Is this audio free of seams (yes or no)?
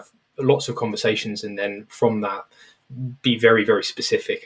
yes